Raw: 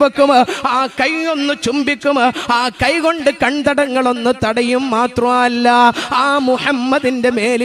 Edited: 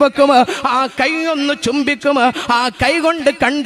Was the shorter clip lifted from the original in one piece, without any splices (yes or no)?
yes